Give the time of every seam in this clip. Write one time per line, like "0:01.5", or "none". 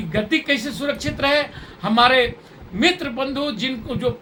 none